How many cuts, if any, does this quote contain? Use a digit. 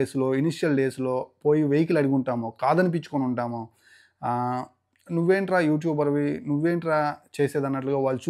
0